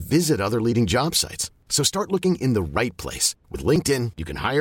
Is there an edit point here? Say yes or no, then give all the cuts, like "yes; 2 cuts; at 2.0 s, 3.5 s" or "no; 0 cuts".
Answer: no; 0 cuts